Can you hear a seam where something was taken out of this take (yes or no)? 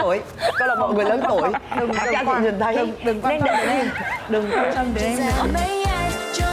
yes